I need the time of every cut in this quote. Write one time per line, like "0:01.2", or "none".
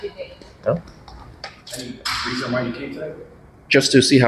0:01.8